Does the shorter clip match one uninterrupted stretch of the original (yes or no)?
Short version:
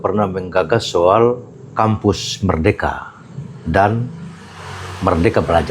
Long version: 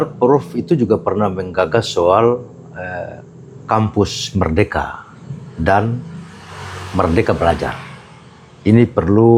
no